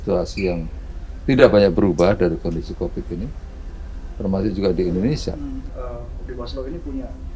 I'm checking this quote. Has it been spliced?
yes; 1 cut; at 5.8 s

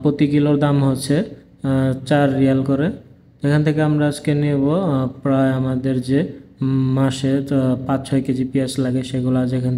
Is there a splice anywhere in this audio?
no; 0 cuts

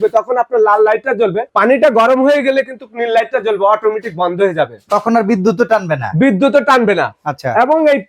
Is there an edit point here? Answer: no; 0 cuts

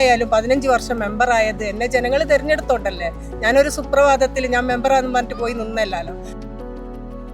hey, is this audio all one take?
yes; 0 cuts

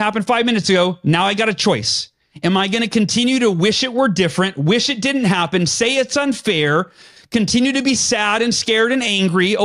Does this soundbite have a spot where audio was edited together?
no; 0 cuts

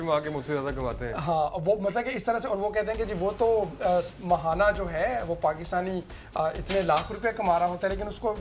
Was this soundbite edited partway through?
no; 0 cuts

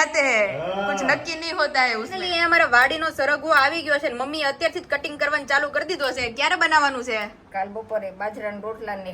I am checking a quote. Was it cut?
yes; 1 cut; at 2.1 s

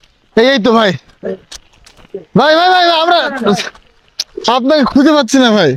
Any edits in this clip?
no; 0 cuts

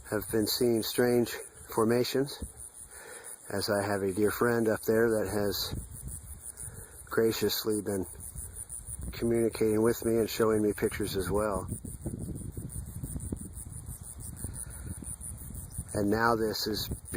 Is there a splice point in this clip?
yes; 1 cut; at 13.5 s

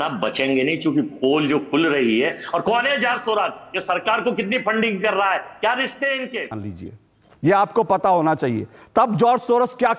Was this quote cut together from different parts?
yes; 1 cut; at 6.6 s

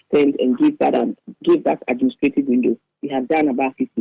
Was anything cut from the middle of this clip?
no; 0 cuts

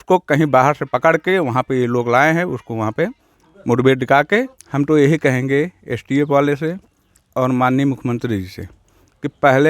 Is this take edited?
yes; 1 cut; at 4.6 s

